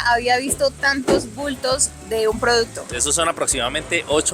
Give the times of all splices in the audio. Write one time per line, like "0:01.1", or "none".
0:02.9